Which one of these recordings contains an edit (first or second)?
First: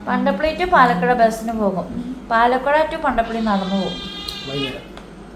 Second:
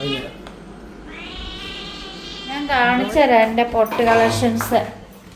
second